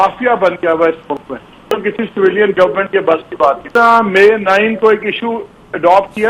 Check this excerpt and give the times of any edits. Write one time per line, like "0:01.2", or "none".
0:01.6
0:03.7